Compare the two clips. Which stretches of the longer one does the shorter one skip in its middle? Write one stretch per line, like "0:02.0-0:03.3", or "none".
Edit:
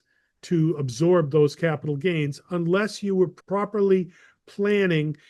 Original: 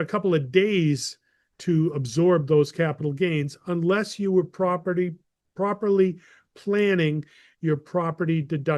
0:04.5-0:05.4